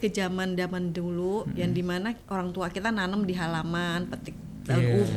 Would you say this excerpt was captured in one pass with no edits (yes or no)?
no